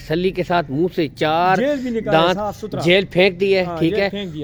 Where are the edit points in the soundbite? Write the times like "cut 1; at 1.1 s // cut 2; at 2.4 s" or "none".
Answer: none